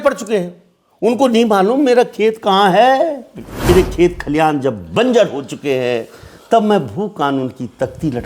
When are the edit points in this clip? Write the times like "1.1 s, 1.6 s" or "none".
3.7 s